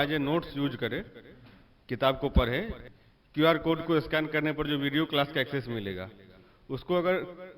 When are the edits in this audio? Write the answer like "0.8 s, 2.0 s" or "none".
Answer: 2.8 s